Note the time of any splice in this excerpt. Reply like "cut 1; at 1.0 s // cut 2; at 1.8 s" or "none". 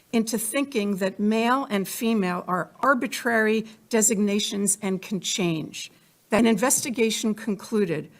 cut 1; at 5.7 s